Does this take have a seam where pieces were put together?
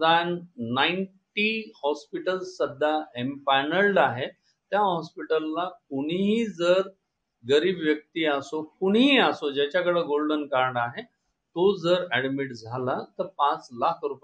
no; 0 cuts

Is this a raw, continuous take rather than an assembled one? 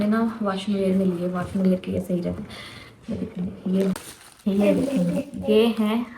no; 1 cut; at 3.9 s

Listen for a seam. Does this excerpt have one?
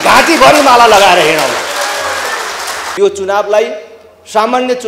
yes; 1 cut; at 2.9 s

